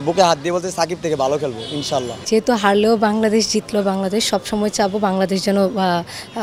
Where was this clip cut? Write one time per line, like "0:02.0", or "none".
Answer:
none